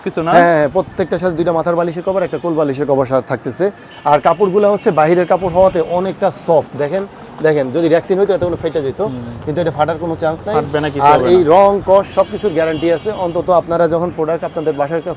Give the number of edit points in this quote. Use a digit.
0